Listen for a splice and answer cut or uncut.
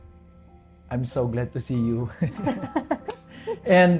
uncut